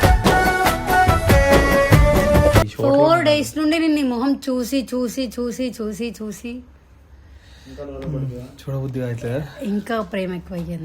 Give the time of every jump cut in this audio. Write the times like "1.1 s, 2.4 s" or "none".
2.7 s